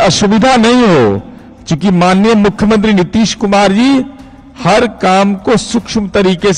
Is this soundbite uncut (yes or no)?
yes